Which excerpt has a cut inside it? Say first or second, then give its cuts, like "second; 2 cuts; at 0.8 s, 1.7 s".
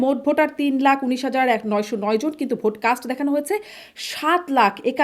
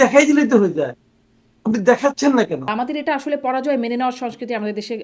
second; 1 cut; at 2.7 s